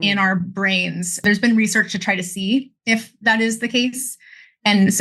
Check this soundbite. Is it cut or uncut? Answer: cut